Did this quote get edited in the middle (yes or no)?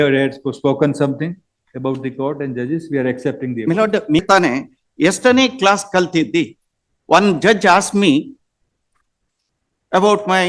yes